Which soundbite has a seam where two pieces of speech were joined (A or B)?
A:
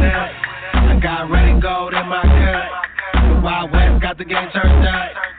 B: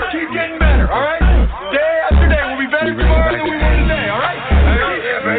A